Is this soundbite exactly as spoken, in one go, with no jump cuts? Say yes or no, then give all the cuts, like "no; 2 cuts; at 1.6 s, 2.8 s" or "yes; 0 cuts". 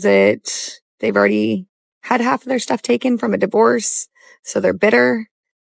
yes; 0 cuts